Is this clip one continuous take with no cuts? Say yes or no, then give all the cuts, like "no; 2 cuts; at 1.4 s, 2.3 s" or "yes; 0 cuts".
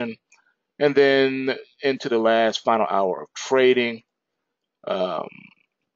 no; 1 cut; at 2.3 s